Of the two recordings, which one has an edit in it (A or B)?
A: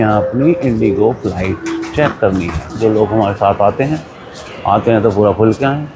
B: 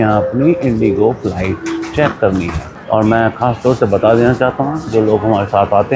A